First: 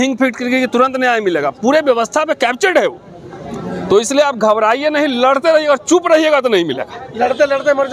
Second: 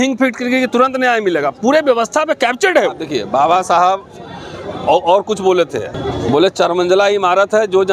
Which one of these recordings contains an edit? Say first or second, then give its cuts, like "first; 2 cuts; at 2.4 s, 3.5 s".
second; 2 cuts; at 3.1 s, 5.9 s